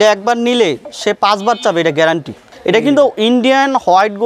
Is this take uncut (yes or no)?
no